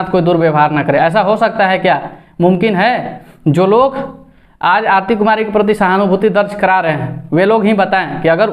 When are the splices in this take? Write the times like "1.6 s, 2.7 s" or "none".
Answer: none